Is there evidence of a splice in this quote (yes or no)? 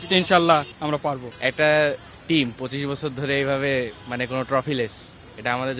yes